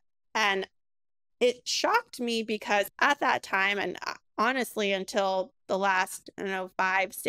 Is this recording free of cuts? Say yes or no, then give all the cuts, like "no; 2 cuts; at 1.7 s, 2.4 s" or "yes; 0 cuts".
no; 1 cut; at 2.9 s